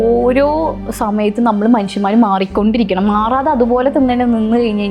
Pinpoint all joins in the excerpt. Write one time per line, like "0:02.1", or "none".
none